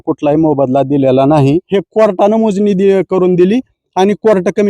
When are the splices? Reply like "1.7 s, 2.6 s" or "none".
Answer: 1.6 s